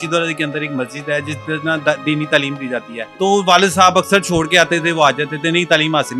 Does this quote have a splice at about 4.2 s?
no; 1 cut; at 3.0 s

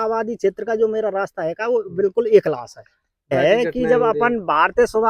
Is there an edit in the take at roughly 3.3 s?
yes; 1 cut; at 3.3 s

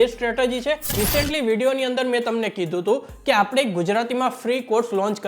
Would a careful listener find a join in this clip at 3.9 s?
no; 1 cut; at 0.9 s

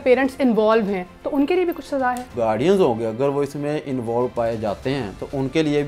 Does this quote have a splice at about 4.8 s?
no; 1 cut; at 2.3 s

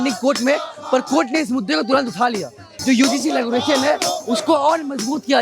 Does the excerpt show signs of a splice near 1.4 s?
no; 1 cut; at 2.7 s

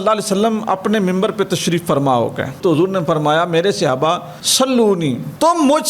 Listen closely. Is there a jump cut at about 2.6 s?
yes; 1 cut; at 2.6 s

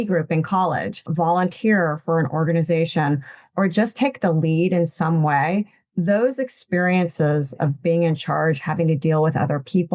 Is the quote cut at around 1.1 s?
yes; 1 cut; at 1.1 s

